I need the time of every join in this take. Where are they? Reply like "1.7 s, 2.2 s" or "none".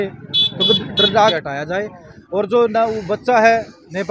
1.3 s